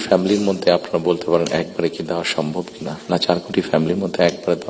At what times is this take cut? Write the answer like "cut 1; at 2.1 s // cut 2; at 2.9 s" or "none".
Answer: none